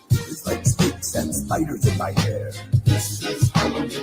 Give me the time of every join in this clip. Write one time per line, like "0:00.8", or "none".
0:02.1